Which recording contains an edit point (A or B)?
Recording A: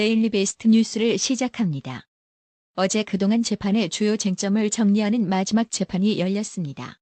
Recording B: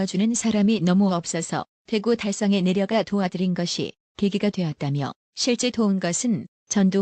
B